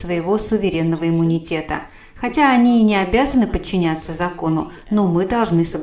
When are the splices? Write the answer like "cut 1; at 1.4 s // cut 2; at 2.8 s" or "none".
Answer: none